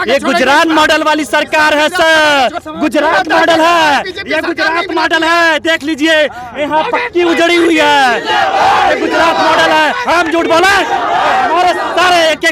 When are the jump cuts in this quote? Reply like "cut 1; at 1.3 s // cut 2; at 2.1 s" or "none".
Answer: cut 1; at 2.6 s